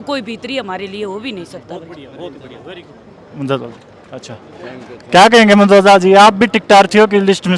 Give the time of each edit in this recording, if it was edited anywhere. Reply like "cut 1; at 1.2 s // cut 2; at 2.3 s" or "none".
none

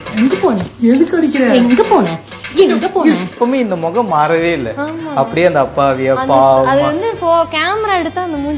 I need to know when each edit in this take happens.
cut 1; at 3.3 s

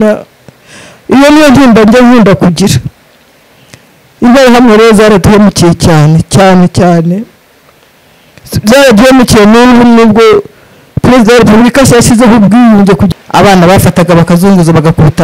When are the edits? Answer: cut 1; at 13.1 s

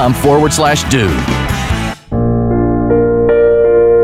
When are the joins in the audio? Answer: none

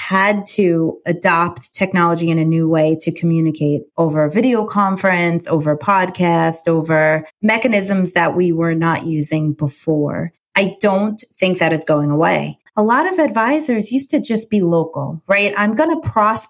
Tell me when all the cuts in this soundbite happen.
cut 1; at 1.0 s // cut 2; at 12.6 s

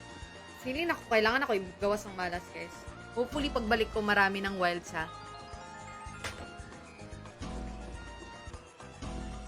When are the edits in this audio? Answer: cut 1; at 7.3 s // cut 2; at 8.5 s

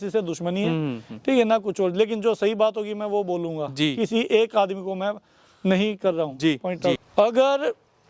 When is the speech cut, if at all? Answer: cut 1; at 7.0 s

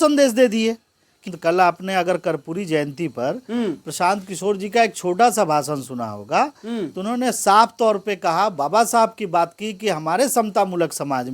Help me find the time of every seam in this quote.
cut 1; at 1.1 s

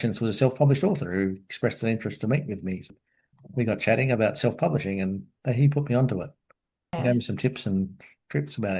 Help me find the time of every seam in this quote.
cut 1; at 2.9 s // cut 2; at 6.9 s

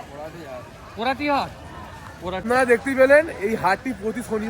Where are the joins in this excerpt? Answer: cut 1; at 2.4 s

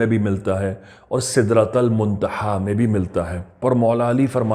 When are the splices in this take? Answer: cut 1; at 3.6 s

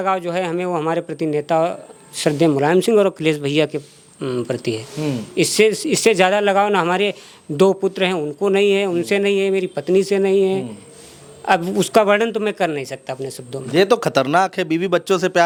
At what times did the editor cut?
none

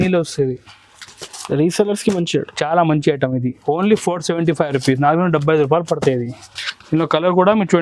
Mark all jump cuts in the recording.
none

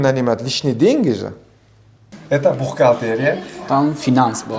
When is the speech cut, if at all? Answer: cut 1; at 2.1 s

